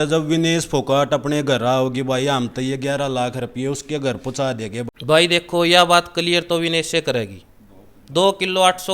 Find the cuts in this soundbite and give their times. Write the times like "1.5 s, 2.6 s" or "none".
4.9 s